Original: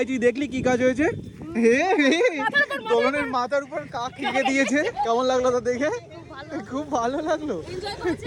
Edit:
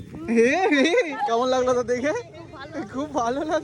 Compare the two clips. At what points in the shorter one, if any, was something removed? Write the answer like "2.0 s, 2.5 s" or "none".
1.2 s